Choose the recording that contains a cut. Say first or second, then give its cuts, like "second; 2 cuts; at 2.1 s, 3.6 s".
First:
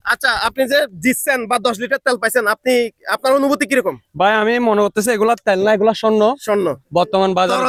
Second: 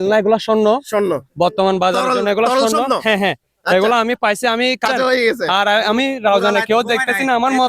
second; 1 cut; at 4.5 s